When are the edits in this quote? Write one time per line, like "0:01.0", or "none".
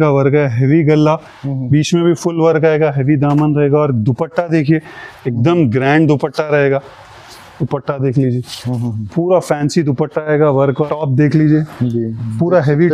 0:10.9